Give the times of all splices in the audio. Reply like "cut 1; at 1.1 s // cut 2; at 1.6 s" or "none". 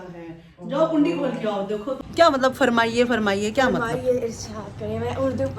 cut 1; at 2.0 s